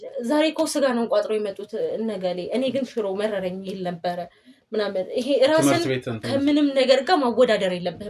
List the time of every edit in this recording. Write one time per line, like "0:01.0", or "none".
none